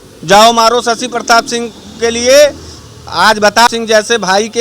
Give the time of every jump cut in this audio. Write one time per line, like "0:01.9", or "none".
0:03.6